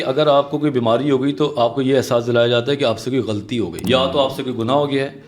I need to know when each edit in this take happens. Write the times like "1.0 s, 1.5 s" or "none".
3.8 s